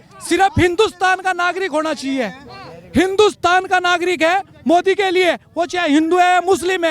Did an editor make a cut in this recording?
no; 0 cuts

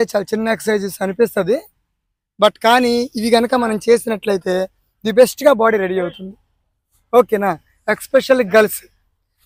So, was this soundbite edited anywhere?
no; 0 cuts

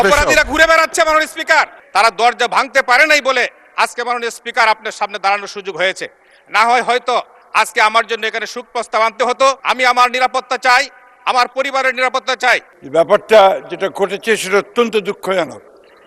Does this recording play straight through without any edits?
no; 3 cuts; at 1.8 s, 9.6 s, 12.7 s

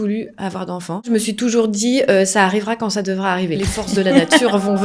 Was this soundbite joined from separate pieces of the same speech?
yes; 2 cuts; at 1.1 s, 3.6 s

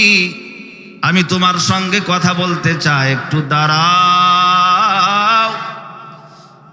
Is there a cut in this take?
no; 0 cuts

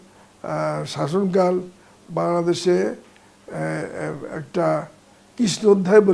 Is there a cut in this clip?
no; 0 cuts

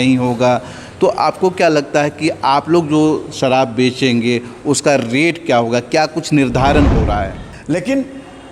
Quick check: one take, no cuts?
no; 1 cut; at 7.5 s

